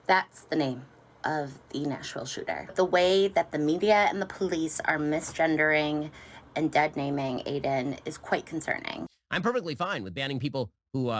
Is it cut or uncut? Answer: cut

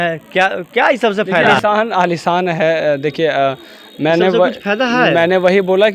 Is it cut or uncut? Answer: uncut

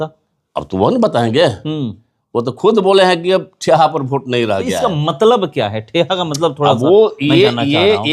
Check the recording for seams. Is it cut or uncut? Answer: uncut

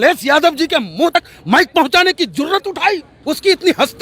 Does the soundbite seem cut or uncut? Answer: cut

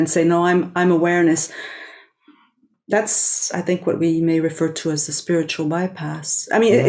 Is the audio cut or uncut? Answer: uncut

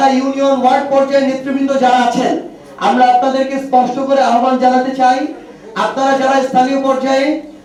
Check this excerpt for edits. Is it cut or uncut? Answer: uncut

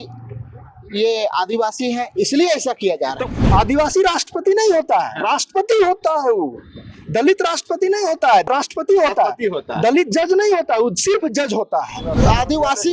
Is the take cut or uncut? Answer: cut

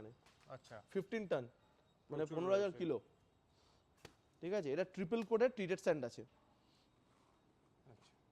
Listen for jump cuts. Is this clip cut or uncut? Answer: uncut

